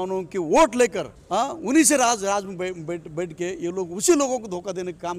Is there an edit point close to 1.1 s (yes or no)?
yes